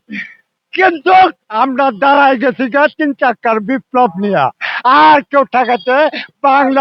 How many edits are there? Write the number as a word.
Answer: zero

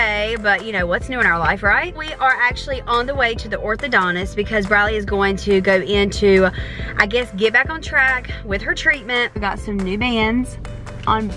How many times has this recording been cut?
two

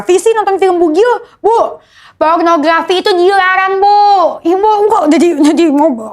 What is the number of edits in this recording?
zero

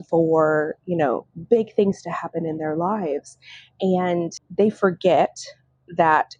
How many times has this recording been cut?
one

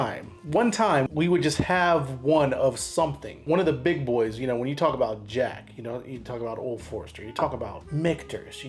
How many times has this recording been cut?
three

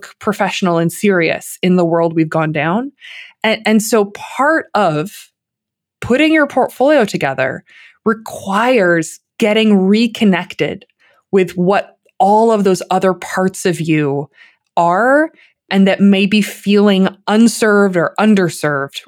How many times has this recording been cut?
two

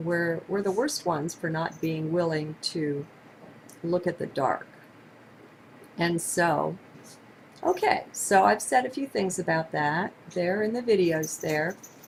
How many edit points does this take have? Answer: zero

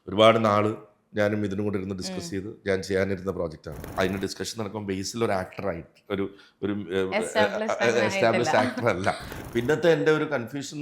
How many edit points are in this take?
two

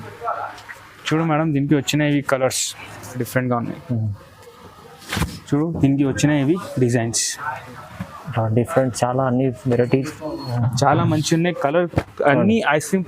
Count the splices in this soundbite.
two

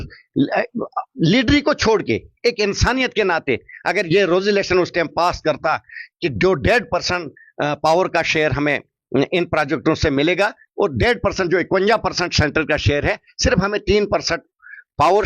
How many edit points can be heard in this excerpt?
zero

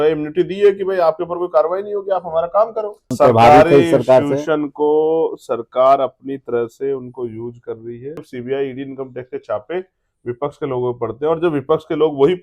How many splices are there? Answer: two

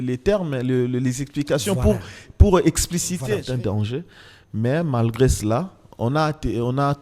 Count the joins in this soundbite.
one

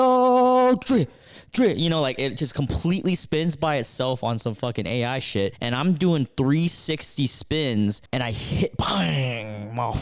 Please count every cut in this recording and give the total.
two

